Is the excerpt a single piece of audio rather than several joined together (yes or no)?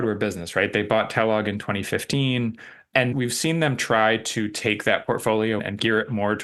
yes